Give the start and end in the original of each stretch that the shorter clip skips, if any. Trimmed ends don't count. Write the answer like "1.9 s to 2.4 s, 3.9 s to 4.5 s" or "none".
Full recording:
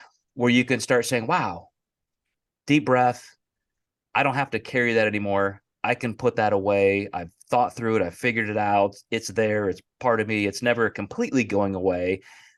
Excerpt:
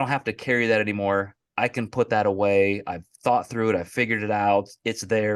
none